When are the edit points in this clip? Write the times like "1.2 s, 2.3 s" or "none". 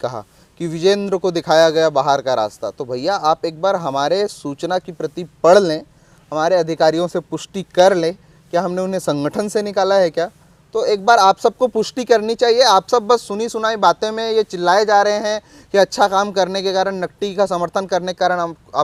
none

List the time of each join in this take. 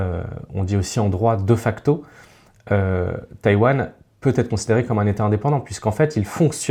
none

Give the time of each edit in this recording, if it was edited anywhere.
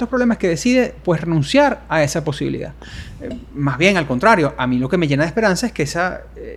none

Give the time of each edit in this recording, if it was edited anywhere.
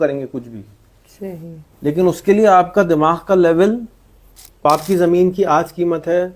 4.6 s

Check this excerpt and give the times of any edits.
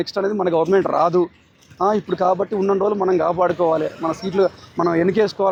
none

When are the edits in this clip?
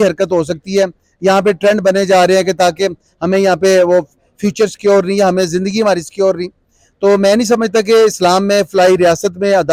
none

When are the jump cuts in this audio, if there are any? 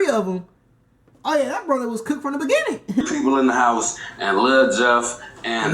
3.0 s

